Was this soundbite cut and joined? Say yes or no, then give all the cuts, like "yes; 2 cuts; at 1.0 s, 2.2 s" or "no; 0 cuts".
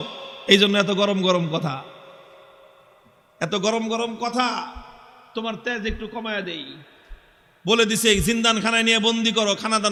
no; 0 cuts